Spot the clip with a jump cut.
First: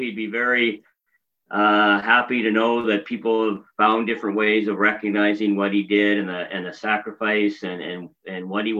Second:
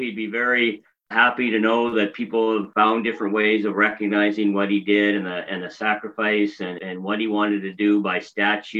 second; 3 cuts; at 1.1 s, 2.7 s, 6.7 s

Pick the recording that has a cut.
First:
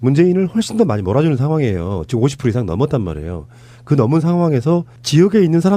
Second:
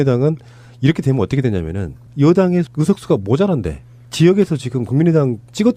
second; 1 cut; at 1.8 s

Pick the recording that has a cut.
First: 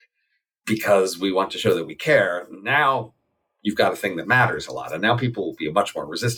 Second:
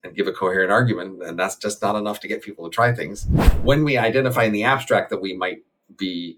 second; 1 cut; at 3.5 s

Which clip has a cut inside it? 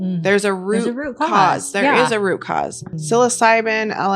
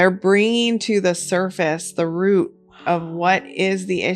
first; 1 cut; at 2.9 s

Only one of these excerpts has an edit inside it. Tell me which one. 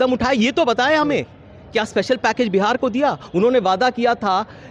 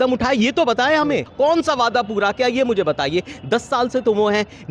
second; 1 cut; at 1.3 s

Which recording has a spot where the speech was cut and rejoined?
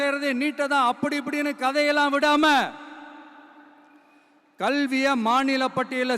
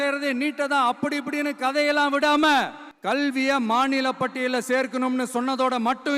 second; 1 cut; at 2.9 s

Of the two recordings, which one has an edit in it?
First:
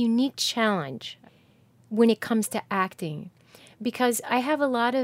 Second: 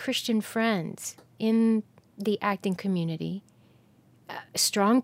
first; 1 cut; at 1.1 s

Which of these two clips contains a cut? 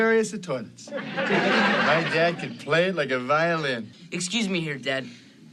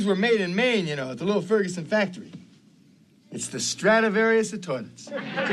first; 1 cut; at 3.9 s

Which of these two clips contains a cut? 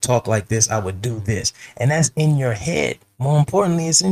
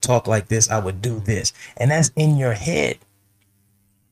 first; 1 cut; at 3.1 s

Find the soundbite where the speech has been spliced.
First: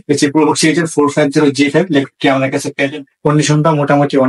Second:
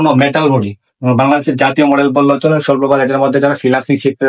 first; 1 cut; at 2.9 s

